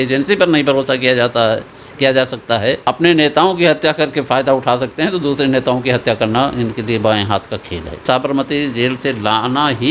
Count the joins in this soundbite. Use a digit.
2